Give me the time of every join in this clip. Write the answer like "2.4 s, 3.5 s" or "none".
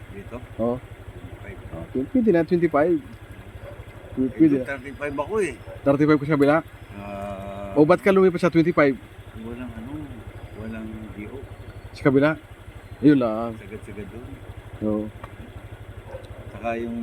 none